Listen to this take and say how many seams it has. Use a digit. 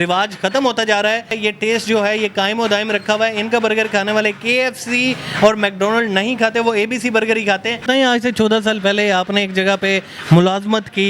2